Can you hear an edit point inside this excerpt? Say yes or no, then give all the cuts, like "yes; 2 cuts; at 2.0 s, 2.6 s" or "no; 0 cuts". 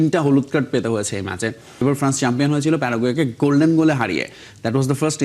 yes; 1 cut; at 1.8 s